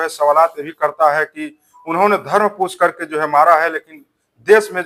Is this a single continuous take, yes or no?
yes